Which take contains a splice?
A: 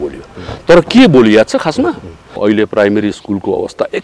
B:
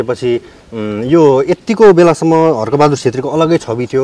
A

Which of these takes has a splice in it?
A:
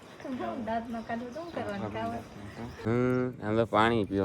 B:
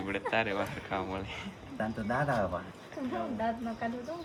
A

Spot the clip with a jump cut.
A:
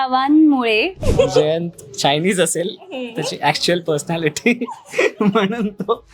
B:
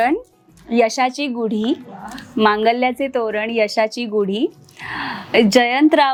A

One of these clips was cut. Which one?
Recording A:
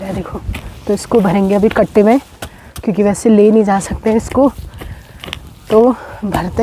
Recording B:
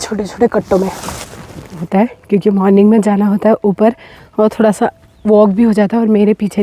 B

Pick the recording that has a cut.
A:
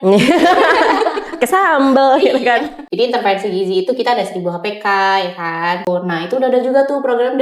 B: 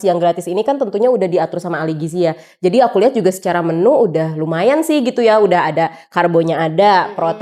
A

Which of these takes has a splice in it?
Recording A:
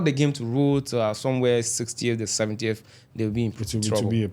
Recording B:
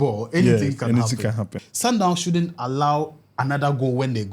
B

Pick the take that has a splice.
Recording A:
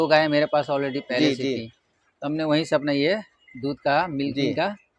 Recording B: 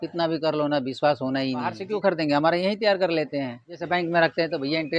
B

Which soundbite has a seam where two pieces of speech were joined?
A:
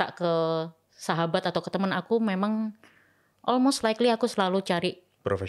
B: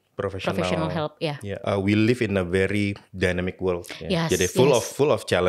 B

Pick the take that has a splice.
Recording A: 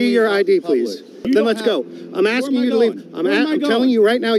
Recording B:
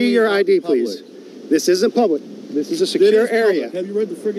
A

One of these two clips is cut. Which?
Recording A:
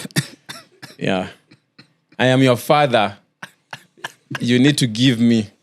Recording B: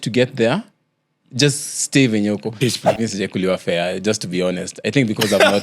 B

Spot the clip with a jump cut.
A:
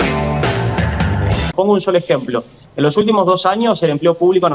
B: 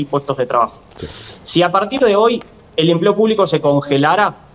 A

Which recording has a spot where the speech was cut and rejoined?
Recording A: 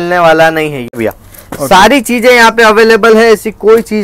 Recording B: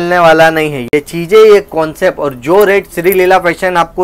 A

